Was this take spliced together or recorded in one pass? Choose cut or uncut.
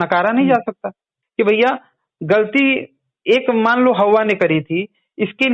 cut